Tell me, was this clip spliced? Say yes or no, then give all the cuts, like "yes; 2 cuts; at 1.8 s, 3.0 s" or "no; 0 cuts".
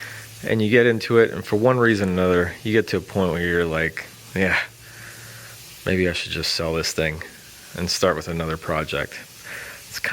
no; 0 cuts